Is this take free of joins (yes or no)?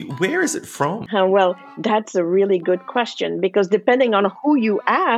no